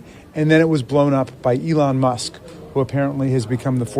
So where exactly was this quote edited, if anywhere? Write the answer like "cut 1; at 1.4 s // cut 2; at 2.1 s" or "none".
none